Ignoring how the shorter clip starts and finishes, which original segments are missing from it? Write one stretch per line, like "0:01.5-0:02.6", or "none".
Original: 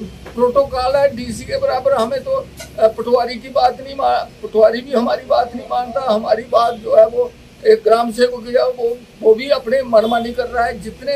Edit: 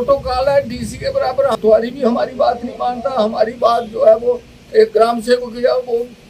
0:02.0-0:04.5